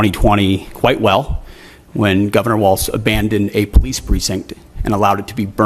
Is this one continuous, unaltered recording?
yes; 0 cuts

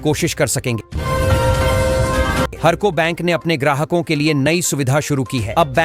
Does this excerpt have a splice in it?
yes; 2 cuts; at 0.9 s, 2.5 s

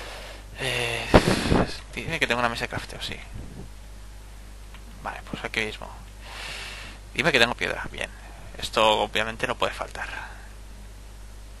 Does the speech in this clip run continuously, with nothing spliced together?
yes; 0 cuts

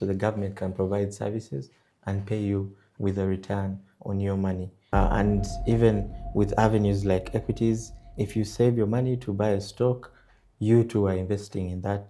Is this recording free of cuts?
no; 1 cut; at 4.8 s

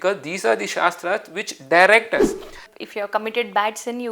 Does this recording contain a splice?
yes; 1 cut; at 2.6 s

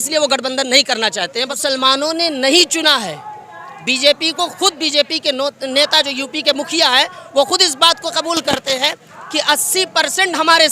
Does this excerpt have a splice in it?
yes; 1 cut; at 1.5 s

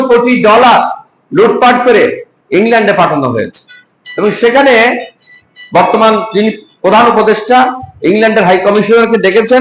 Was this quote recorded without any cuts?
yes; 0 cuts

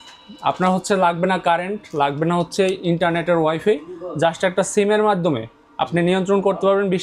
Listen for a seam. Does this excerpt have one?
no; 0 cuts

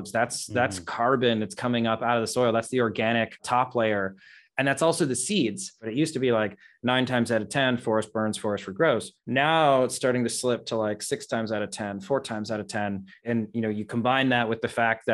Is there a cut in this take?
yes; 1 cut; at 5.8 s

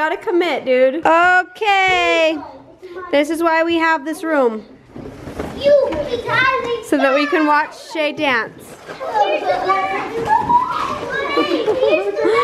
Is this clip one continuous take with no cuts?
no; 1 cut; at 1.0 s

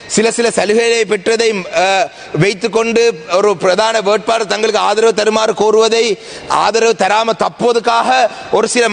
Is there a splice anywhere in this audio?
no; 0 cuts

